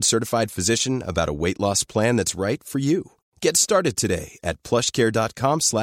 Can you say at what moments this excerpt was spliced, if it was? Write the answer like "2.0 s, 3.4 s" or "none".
none